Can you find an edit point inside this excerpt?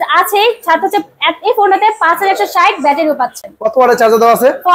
no; 0 cuts

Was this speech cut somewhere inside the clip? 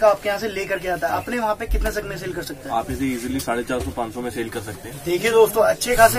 no; 0 cuts

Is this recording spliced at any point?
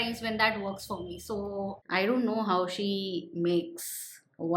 yes; 1 cut; at 1.8 s

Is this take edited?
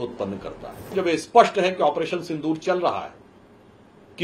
yes; 1 cut; at 0.9 s

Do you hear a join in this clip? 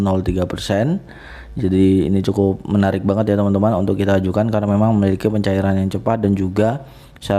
no; 0 cuts

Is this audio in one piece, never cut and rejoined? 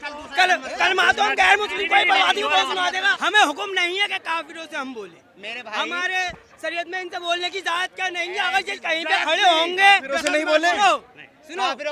no; 1 cut; at 3.1 s

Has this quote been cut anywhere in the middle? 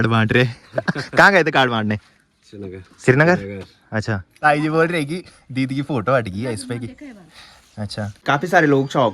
yes; 2 cuts; at 4.3 s, 8.2 s

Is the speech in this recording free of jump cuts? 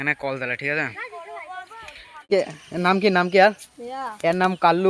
no; 1 cut; at 2.3 s

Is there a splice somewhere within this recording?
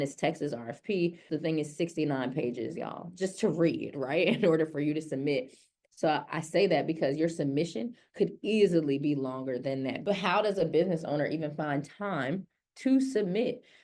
yes; 2 cuts; at 1.3 s, 10.0 s

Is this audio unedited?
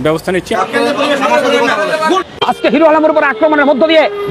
no; 1 cut; at 2.2 s

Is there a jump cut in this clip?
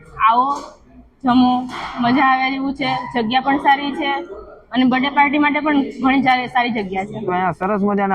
yes; 1 cut; at 7.2 s

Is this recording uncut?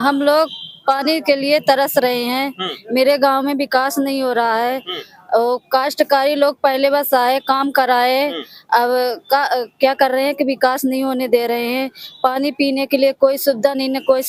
yes; 0 cuts

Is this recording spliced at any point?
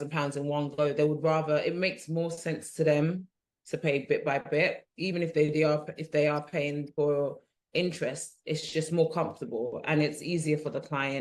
no; 0 cuts

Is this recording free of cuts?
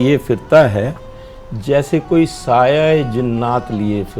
yes; 0 cuts

